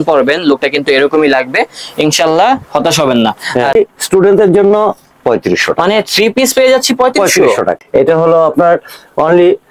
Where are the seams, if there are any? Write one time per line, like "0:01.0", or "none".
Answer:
0:03.7
0:07.8